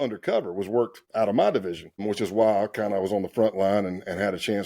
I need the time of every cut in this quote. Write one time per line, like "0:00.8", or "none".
0:01.0